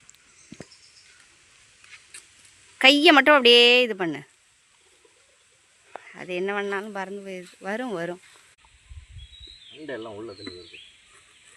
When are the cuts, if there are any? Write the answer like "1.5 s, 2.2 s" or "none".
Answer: 8.5 s